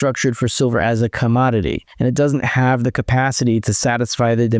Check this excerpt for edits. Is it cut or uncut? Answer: cut